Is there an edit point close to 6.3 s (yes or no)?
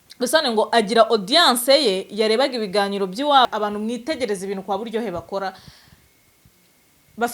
no